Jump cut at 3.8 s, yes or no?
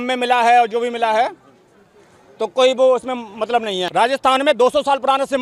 yes